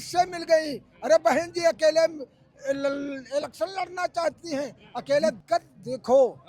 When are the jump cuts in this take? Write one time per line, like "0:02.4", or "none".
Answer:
0:05.4